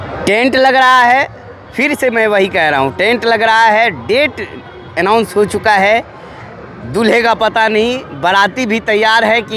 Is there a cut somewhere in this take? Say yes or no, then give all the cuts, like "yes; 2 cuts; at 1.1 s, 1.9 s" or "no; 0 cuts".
no; 0 cuts